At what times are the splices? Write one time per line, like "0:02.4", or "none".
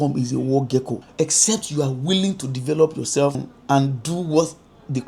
0:01.0
0:03.5